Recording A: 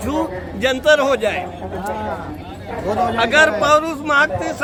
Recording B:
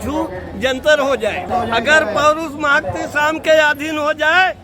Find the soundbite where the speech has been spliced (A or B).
B